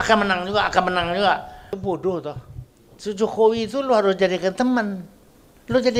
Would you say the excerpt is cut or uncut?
cut